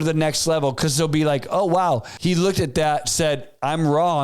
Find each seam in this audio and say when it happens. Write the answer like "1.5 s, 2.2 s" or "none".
2.1 s